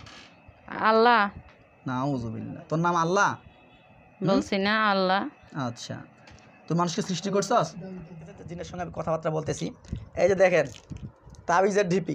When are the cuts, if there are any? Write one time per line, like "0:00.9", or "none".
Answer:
0:08.6